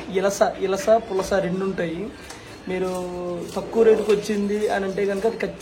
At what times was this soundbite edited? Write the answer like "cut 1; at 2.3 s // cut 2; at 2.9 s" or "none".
none